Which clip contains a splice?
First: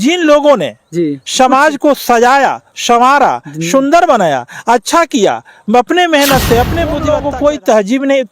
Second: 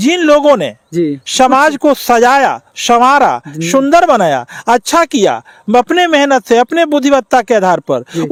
first; 1 cut; at 7.0 s

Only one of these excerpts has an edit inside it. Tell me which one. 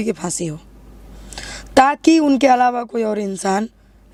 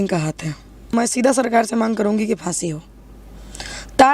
second; 1 cut; at 0.9 s

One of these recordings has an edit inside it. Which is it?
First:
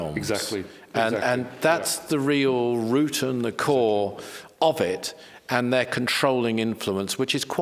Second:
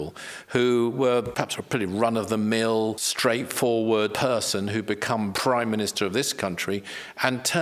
second; 4 cuts; at 1.3 s, 3.0 s, 4.1 s, 5.4 s

